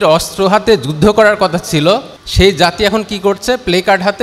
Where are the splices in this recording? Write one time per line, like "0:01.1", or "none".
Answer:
0:02.2